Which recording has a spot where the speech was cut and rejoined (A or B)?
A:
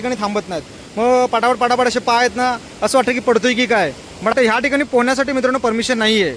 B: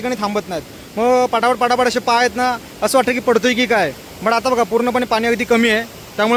A